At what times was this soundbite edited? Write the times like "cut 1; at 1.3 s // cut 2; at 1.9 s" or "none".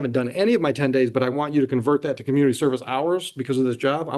none